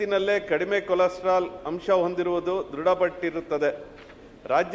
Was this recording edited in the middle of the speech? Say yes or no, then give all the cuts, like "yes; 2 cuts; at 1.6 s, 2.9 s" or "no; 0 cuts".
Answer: no; 0 cuts